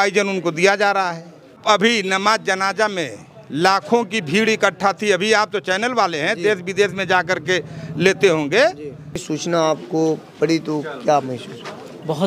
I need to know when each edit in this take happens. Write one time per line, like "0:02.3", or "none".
0:01.6
0:09.3